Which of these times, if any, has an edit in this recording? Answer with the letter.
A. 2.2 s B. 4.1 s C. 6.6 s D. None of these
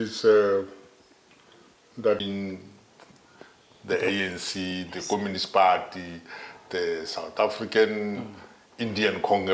A